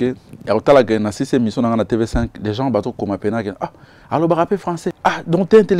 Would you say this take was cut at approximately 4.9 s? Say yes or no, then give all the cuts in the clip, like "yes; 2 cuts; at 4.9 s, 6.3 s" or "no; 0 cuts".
yes; 1 cut; at 4.9 s